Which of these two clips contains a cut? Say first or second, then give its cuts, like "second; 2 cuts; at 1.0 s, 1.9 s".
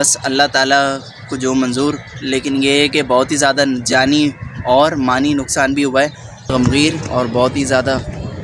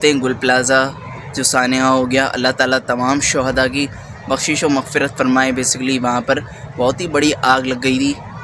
first; 1 cut; at 6.5 s